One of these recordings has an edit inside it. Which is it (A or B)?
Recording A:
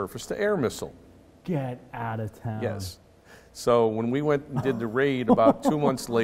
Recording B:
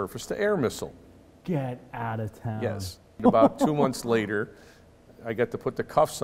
B